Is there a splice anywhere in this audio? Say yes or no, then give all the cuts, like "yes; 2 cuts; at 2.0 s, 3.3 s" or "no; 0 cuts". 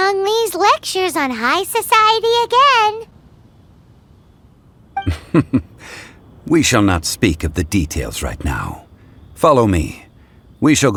no; 0 cuts